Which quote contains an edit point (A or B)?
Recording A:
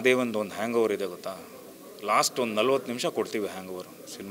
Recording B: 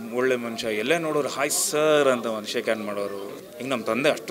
B